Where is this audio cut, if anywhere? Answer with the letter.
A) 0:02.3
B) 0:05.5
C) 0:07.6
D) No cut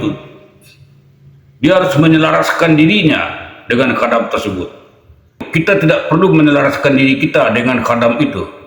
B